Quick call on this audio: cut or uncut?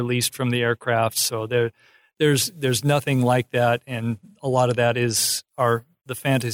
uncut